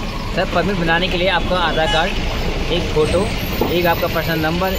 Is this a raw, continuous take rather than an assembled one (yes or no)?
yes